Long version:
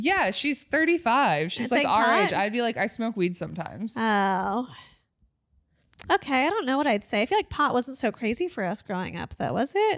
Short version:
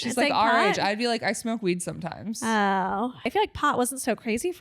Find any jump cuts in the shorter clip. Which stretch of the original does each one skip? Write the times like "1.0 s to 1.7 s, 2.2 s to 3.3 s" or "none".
4.8 s to 7.2 s

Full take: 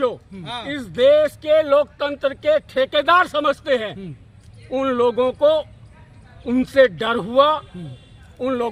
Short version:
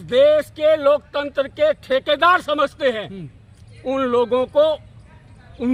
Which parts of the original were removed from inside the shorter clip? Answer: none

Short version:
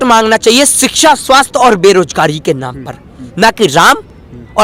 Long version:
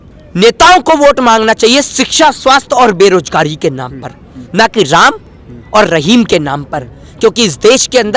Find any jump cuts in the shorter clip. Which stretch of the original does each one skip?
none

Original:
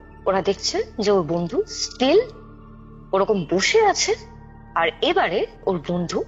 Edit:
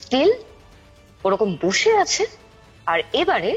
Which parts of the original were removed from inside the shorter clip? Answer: none

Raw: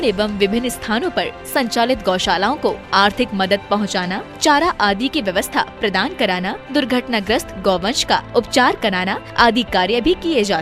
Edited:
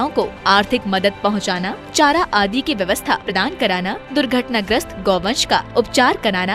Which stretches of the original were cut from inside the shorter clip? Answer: 5.8 s to 5.9 s

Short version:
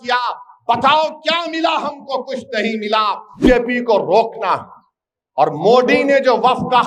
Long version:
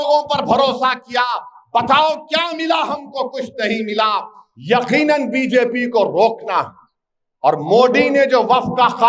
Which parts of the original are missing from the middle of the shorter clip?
4.5 s to 5.5 s

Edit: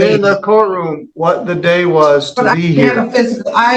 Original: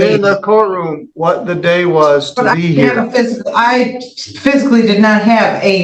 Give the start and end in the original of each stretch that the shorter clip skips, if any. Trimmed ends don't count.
none

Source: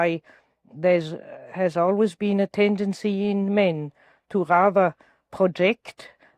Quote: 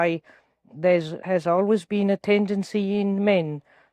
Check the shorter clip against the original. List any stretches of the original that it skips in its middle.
1.2 s to 1.5 s

